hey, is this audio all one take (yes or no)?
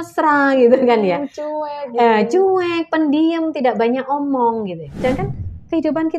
no